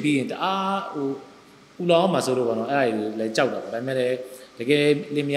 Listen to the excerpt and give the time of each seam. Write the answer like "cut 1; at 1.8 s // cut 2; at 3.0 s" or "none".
none